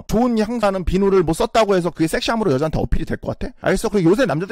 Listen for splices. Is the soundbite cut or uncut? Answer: cut